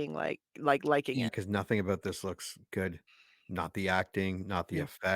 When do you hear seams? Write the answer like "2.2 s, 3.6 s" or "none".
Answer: 1.3 s